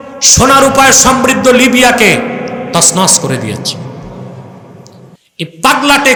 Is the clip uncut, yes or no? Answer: yes